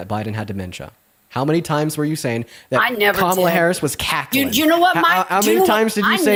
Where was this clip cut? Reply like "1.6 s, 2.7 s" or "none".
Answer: none